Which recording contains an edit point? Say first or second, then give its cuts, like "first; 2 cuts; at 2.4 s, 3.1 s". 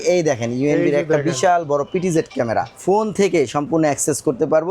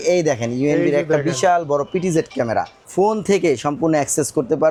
first; 1 cut; at 2.7 s